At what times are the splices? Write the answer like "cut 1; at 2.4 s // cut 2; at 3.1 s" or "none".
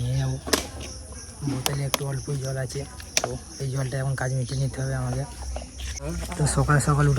cut 1; at 6.0 s